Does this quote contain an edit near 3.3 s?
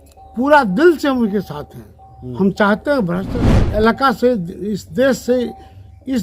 yes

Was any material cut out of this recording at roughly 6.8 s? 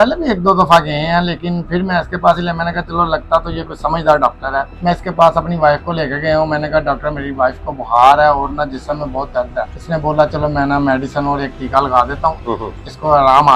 no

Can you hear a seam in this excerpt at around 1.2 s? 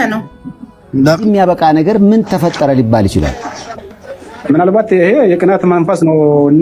yes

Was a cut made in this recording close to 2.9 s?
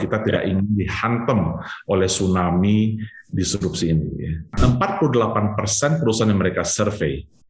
no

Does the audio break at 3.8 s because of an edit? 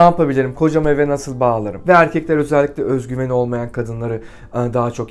no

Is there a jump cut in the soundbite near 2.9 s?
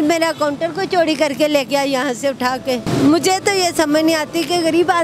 yes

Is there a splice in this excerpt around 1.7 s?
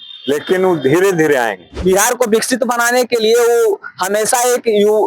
yes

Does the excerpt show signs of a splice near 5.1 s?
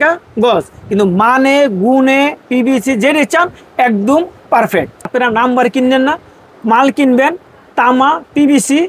yes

